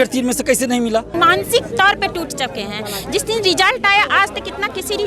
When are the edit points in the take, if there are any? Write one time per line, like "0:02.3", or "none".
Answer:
0:01.1